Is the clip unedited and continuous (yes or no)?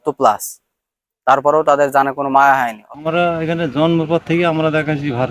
no